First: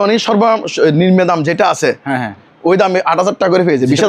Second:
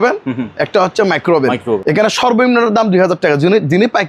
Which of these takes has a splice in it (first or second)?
second